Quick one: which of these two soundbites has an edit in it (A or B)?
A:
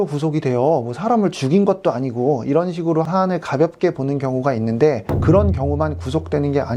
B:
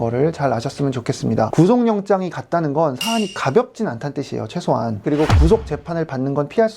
B